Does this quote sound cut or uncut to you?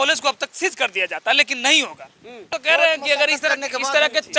cut